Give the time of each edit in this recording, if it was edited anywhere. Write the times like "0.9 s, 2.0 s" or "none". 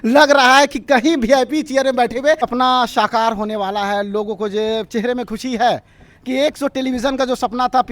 2.5 s